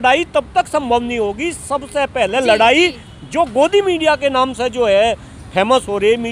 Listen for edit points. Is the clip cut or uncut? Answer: uncut